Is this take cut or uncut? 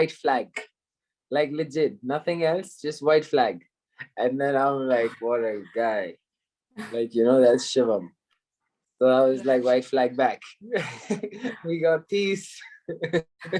uncut